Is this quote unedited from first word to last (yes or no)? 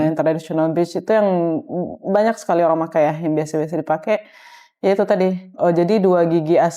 yes